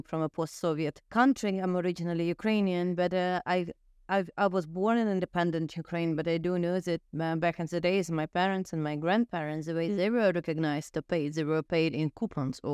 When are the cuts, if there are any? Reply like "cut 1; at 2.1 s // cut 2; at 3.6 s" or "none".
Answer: cut 1; at 1.1 s